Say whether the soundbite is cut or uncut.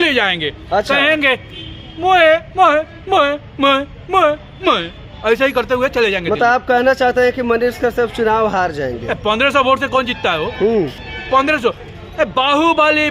uncut